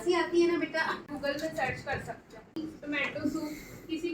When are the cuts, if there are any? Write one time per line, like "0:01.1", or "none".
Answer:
0:01.1
0:02.6